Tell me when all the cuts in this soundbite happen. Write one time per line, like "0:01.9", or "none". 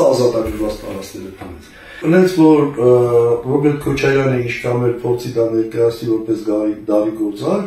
0:02.0